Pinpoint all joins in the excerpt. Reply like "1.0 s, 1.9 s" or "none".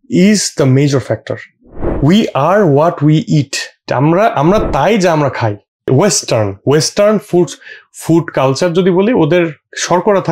3.8 s, 5.9 s